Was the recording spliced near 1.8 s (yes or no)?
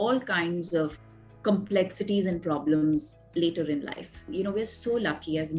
no